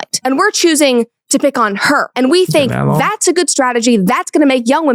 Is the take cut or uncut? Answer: uncut